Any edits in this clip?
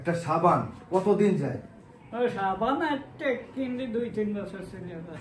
no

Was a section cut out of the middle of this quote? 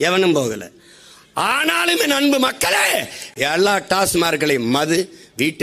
no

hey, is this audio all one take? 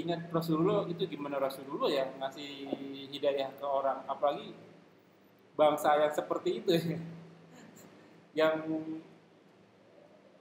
yes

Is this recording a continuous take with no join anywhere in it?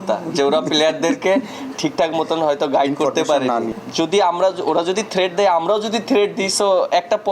no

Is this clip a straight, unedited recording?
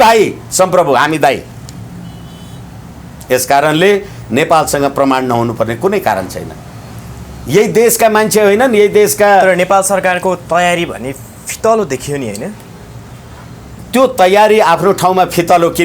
yes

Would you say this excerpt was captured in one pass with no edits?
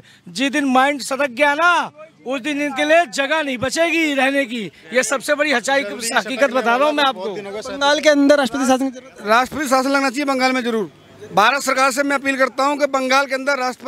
yes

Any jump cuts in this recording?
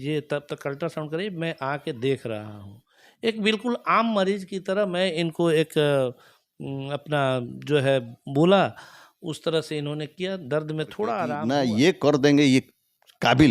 yes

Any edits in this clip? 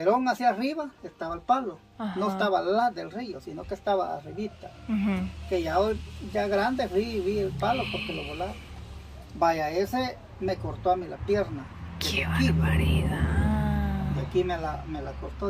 no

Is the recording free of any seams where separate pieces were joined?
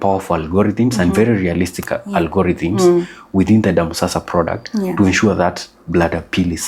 yes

